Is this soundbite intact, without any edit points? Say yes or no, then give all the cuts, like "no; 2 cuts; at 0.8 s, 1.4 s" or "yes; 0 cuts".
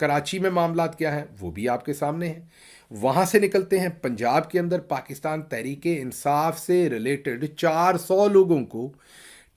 yes; 0 cuts